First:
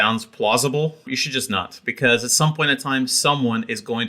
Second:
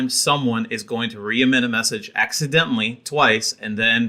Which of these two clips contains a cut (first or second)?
first